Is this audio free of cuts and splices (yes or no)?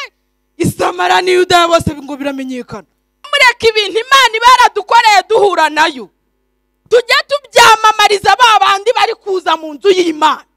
no